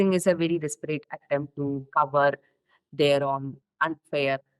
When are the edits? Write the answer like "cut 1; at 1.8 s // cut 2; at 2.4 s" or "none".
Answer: cut 1; at 3.6 s